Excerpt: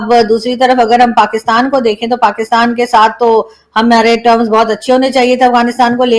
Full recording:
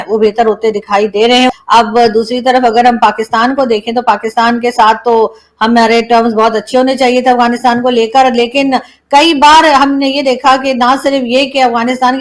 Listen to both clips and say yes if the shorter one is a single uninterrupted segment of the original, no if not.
yes